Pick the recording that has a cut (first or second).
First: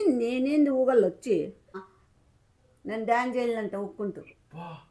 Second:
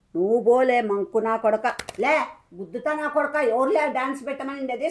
first